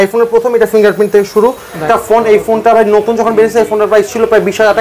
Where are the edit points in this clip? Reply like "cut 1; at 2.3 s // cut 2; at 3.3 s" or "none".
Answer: cut 1; at 1.8 s

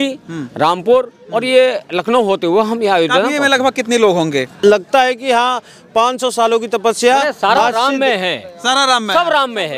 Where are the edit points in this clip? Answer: cut 1; at 4.5 s

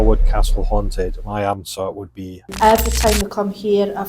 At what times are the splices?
cut 1; at 2.4 s

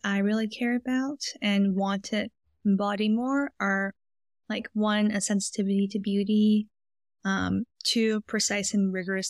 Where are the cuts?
none

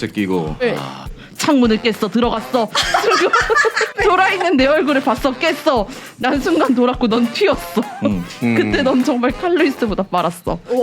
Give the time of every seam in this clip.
cut 1; at 1.0 s // cut 2; at 3.9 s

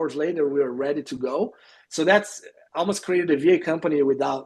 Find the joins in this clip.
none

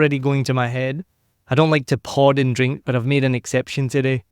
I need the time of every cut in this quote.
none

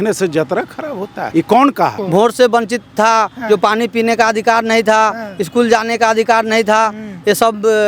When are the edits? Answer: cut 1; at 1.2 s // cut 2; at 2.0 s

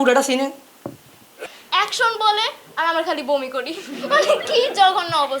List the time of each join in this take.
cut 1; at 1.5 s

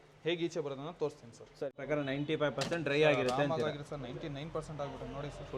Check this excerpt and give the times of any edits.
cut 1; at 1.8 s

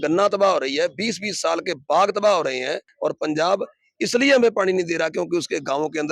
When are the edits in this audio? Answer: cut 1; at 2.9 s

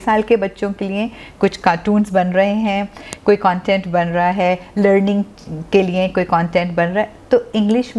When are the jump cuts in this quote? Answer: none

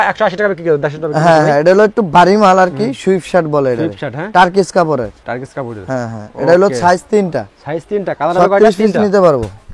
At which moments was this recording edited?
none

